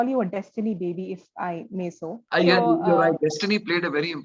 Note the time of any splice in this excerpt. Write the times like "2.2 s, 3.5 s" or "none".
2.1 s